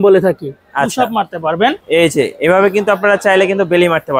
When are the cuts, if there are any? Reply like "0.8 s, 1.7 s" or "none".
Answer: 1.8 s